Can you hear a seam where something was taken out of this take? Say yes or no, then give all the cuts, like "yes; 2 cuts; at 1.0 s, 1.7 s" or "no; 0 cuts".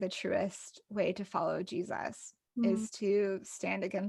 no; 0 cuts